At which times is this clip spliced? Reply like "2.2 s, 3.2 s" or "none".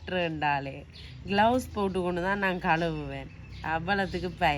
none